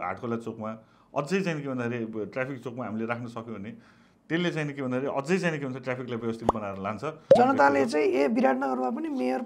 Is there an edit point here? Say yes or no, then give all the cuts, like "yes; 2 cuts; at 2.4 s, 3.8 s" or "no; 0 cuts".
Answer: yes; 1 cut; at 7.3 s